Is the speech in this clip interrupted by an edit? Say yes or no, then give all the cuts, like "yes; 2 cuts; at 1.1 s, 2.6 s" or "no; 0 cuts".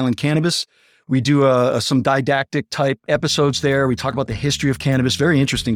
no; 0 cuts